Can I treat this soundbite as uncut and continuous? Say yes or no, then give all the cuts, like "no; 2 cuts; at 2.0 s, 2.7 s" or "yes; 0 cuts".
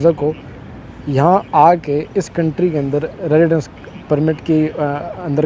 yes; 0 cuts